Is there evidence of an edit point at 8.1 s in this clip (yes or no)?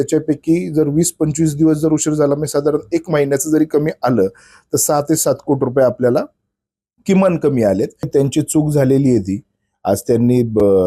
yes